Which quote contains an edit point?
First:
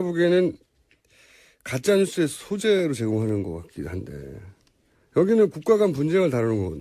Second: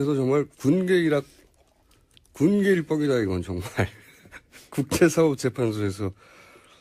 second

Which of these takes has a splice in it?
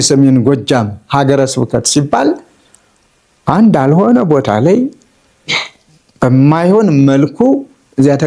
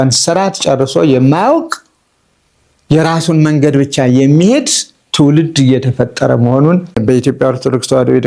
second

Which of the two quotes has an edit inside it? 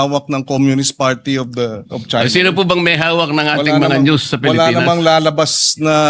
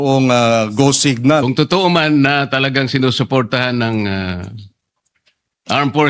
second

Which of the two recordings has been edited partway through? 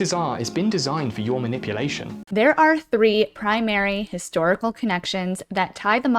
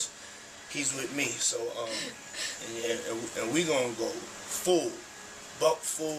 first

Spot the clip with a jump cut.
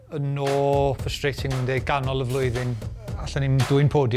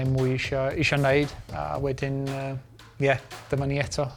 first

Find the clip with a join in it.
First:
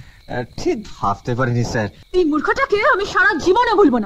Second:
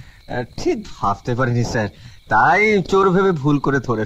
first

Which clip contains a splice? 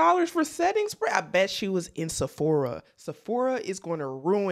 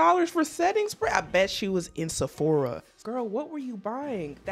second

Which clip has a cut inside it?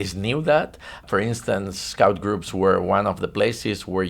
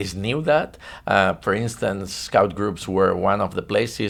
first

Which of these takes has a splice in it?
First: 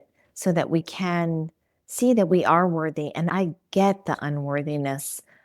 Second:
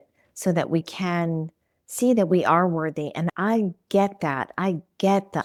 first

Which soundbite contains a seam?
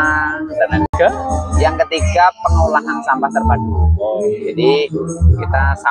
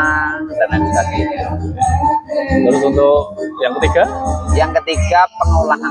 first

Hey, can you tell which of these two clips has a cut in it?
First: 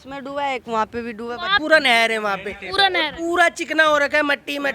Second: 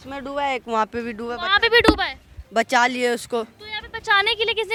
first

